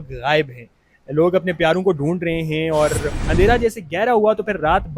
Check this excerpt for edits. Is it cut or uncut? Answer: cut